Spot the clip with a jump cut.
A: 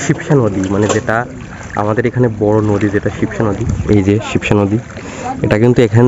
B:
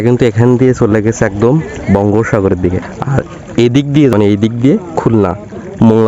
B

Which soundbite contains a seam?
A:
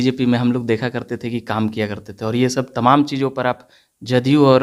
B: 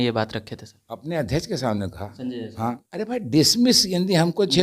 B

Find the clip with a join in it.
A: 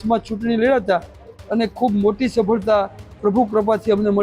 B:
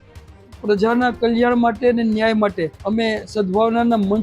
B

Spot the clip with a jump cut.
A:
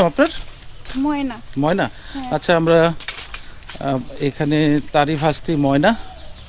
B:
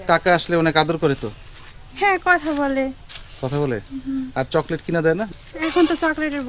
B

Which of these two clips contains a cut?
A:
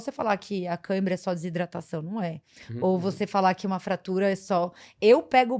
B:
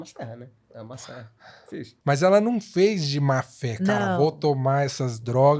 B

